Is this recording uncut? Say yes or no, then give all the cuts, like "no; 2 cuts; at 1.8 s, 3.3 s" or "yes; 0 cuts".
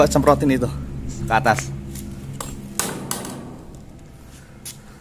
yes; 0 cuts